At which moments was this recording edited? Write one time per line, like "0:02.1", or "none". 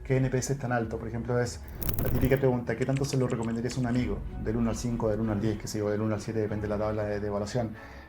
none